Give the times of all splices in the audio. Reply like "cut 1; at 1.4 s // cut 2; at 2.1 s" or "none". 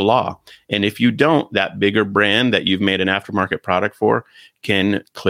none